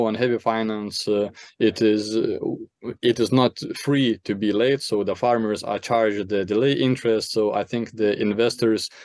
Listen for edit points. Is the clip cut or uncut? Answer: uncut